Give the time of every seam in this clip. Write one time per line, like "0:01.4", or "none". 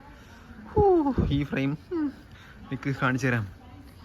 none